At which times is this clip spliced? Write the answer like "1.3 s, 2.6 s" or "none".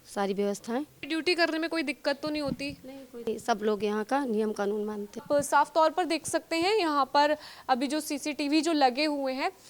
1.0 s, 3.3 s, 5.2 s